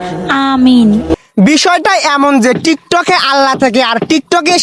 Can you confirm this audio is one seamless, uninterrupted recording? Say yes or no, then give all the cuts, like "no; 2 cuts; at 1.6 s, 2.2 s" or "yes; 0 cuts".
yes; 0 cuts